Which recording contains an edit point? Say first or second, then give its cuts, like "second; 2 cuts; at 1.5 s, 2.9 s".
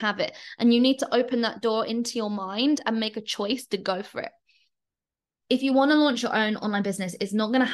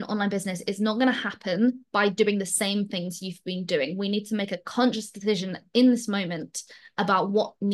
first; 1 cut; at 5.3 s